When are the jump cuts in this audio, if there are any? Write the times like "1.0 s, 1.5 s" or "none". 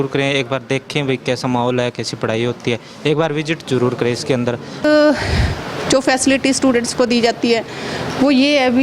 4.8 s